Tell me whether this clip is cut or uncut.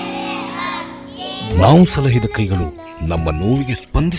uncut